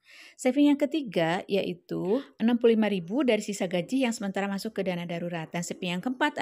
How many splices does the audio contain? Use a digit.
1